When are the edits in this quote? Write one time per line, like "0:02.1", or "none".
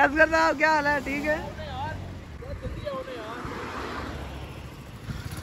0:02.4

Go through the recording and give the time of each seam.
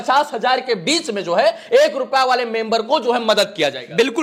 none

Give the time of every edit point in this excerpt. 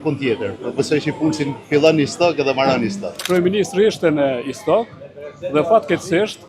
0:03.1

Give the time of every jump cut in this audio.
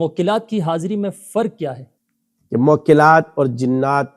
0:01.9

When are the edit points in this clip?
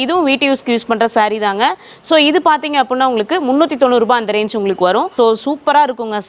0:05.1

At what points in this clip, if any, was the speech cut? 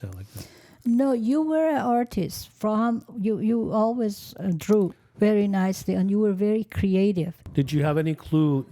0:07.4

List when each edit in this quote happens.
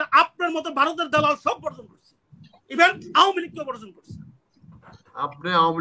none

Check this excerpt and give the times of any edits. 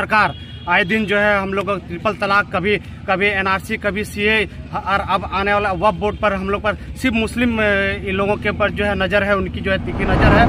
none

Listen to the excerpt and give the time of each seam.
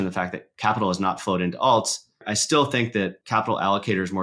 0:02.3
0:03.2

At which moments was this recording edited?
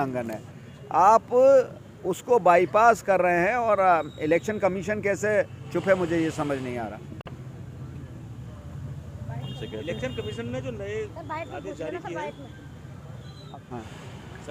none

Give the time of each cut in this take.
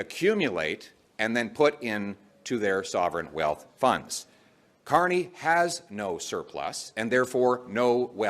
0:02.2

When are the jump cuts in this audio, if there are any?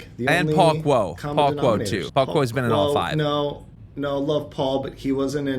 0:02.1

